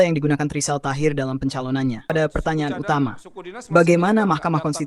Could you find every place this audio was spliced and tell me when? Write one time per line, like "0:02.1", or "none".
0:02.1